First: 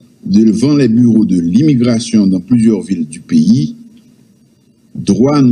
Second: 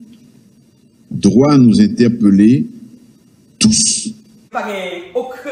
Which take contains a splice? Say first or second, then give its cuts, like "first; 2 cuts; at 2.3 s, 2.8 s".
second; 1 cut; at 4.4 s